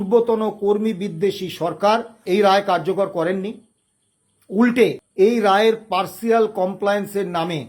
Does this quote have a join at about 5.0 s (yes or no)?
yes